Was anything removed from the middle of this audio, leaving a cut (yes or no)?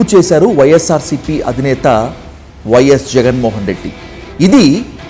no